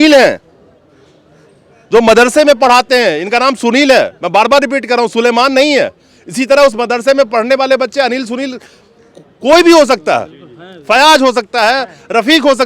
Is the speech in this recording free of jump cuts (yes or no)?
yes